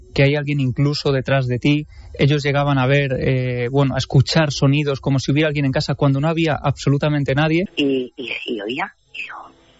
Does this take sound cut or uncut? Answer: cut